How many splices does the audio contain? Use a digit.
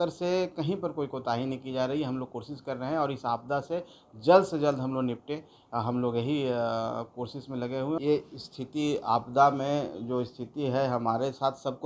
1